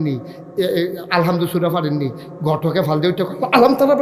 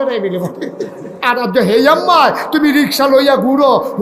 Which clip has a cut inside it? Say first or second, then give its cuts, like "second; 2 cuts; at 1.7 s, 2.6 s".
second; 1 cut; at 1.1 s